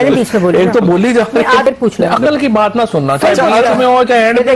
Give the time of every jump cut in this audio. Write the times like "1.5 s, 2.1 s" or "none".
1.7 s